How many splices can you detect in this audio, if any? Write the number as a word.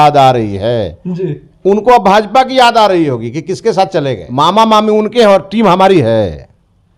one